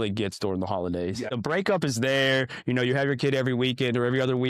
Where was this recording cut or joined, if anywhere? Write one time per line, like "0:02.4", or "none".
0:01.3